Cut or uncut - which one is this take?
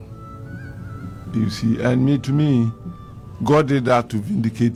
uncut